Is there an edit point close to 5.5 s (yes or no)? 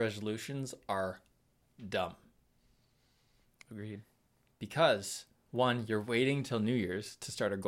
no